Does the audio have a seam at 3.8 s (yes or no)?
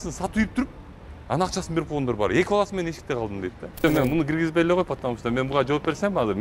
yes